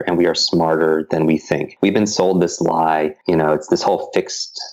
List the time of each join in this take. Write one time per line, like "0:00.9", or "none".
0:01.7
0:03.2